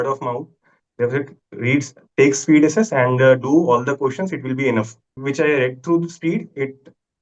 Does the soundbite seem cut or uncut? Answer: cut